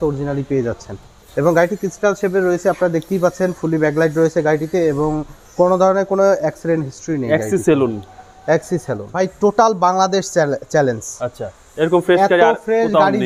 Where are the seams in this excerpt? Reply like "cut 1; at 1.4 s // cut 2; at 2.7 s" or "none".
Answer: cut 1; at 1.2 s // cut 2; at 9.1 s